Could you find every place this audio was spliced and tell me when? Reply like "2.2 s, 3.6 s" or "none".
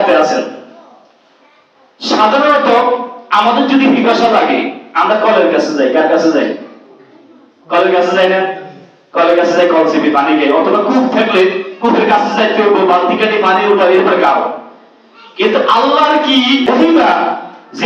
16.7 s